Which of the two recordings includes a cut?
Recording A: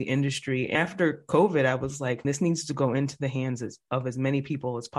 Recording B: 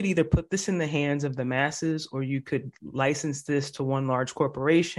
A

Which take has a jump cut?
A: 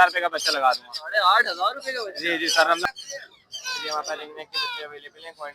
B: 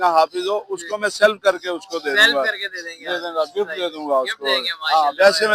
A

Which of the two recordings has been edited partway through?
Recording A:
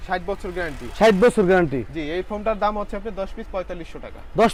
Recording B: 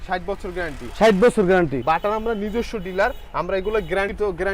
B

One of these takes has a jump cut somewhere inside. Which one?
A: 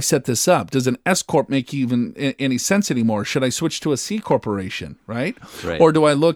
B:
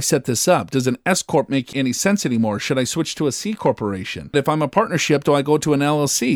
B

